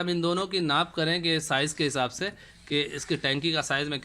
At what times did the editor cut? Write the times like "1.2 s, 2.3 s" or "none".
none